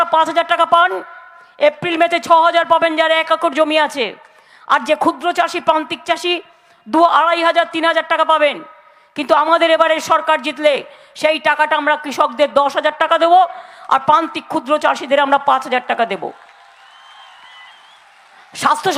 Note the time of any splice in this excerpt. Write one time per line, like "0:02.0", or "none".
none